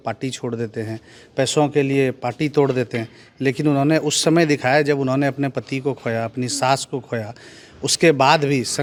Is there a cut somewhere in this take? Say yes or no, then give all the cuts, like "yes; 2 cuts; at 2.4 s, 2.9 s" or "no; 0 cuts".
no; 0 cuts